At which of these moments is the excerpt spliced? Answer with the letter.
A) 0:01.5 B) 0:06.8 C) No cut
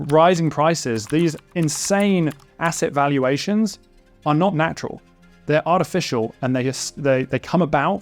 A